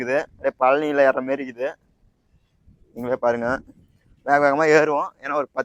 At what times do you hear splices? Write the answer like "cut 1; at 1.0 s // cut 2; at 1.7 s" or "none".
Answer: none